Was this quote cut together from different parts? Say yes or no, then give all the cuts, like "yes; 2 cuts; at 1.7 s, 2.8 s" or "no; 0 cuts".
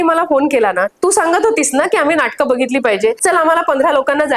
yes; 2 cuts; at 0.9 s, 3.2 s